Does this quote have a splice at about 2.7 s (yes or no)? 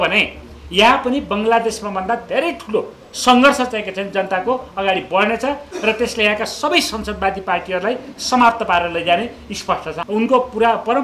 no